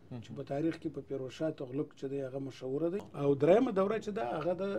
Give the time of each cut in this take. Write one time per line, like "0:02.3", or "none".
0:03.1